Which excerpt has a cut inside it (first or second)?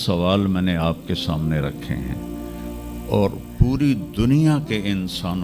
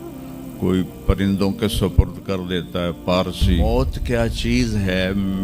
second